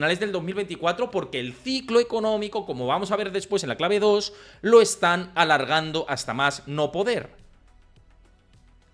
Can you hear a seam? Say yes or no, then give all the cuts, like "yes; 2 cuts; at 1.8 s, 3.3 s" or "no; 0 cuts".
no; 0 cuts